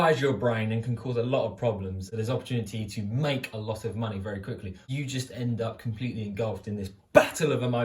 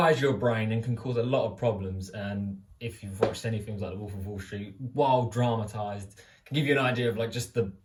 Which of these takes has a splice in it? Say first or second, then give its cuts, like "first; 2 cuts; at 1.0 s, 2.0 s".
first; 2 cuts; at 2.1 s, 4.9 s